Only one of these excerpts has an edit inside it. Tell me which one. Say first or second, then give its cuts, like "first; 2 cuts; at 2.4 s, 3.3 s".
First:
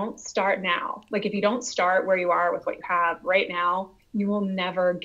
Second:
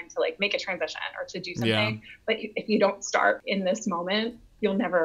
second; 1 cut; at 3.4 s